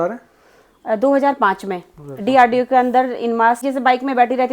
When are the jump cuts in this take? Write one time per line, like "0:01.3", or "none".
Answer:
0:03.6

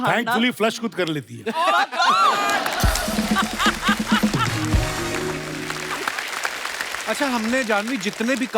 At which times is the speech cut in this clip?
0:05.8
0:07.0

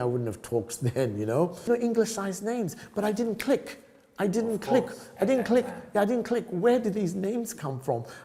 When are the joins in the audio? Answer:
0:01.7

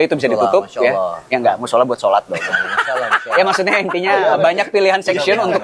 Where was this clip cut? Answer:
none

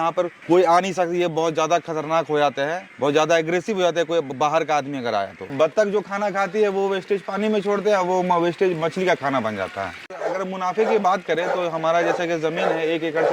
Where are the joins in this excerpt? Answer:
0:05.4
0:10.1

